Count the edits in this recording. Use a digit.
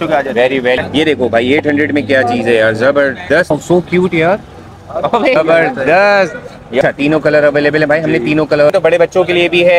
5